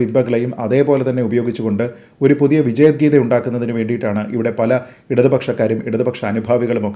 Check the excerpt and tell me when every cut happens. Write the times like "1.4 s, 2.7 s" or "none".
none